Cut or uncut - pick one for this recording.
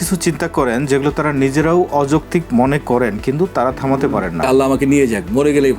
cut